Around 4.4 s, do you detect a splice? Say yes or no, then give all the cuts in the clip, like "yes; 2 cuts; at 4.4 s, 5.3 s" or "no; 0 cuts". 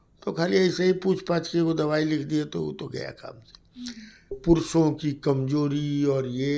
yes; 1 cut; at 4.4 s